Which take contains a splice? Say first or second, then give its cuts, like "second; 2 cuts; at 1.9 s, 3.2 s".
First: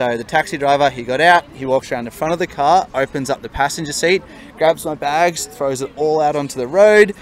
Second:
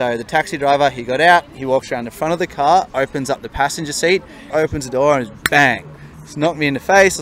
second; 1 cut; at 4.5 s